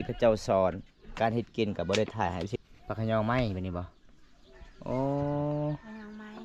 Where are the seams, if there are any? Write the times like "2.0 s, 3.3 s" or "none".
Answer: 2.5 s

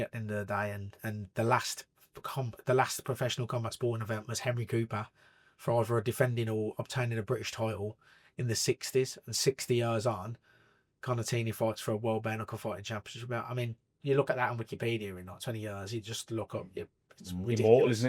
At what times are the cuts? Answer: none

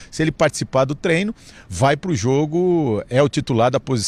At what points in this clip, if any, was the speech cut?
none

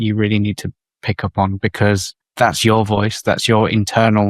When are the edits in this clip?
2.2 s

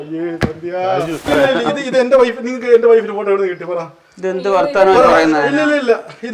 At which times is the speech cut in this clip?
1.3 s

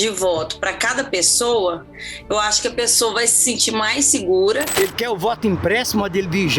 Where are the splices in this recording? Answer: 4.7 s

